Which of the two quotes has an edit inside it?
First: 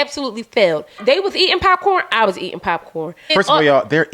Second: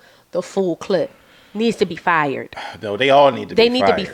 first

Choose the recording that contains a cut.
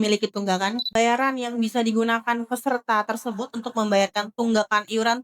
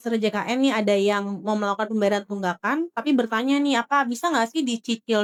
first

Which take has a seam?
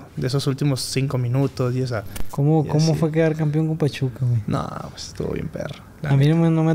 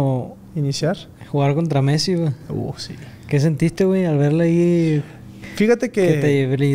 first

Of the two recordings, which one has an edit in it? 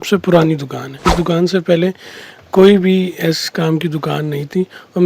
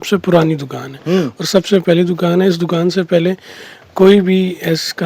first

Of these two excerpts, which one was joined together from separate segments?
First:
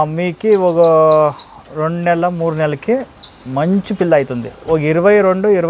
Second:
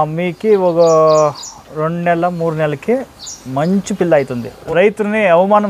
second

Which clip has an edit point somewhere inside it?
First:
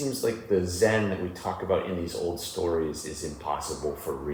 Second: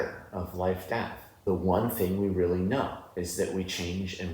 second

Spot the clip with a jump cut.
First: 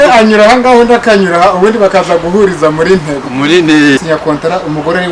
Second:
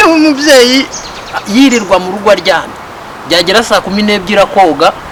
first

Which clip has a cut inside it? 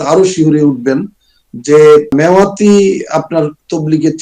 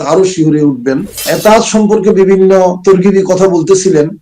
second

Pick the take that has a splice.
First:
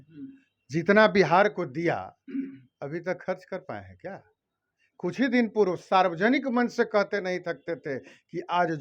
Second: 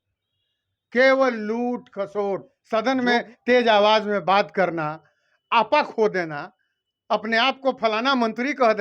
second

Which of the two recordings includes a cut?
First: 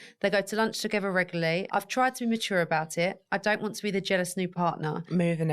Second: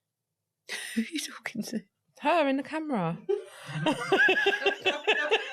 first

